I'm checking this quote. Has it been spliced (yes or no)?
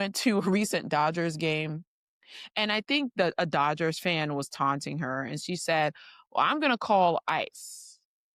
no